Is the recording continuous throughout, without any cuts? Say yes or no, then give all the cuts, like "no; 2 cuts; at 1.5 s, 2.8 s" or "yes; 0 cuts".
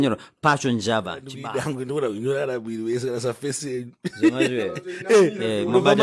no; 1 cut; at 1.4 s